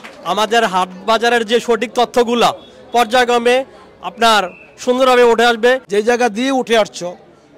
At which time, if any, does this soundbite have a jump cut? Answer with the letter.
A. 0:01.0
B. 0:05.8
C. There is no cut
B